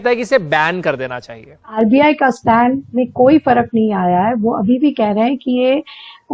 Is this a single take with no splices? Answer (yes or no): no